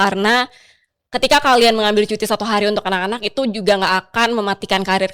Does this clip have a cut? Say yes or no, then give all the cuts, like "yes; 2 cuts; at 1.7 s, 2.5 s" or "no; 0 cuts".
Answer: no; 0 cuts